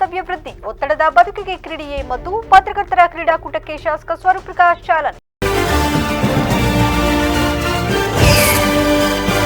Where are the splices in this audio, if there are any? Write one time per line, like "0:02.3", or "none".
0:05.3